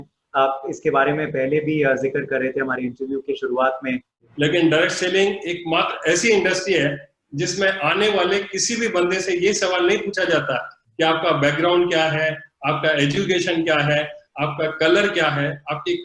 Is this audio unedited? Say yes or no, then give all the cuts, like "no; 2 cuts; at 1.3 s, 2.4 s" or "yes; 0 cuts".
no; 1 cut; at 4.2 s